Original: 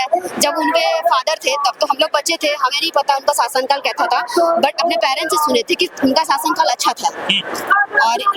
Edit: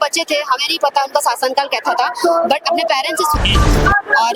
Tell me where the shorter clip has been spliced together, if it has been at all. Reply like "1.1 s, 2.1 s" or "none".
3.3 s